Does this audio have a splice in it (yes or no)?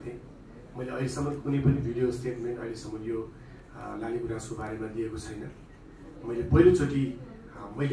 no